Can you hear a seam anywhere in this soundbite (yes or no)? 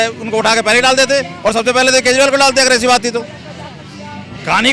no